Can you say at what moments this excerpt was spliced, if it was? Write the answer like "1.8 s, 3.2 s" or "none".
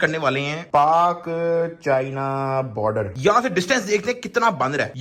none